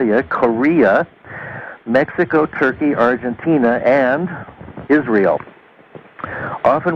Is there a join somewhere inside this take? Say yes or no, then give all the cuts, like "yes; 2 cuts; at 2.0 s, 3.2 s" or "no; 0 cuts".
yes; 1 cut; at 4.1 s